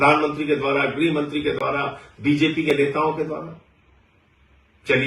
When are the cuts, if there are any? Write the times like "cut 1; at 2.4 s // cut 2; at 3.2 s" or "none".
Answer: none